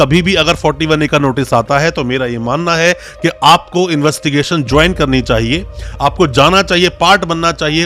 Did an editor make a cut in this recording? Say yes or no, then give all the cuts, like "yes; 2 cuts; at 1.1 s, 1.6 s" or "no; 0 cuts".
no; 0 cuts